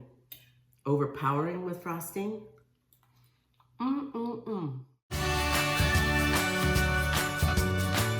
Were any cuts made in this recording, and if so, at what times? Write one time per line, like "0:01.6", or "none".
0:05.0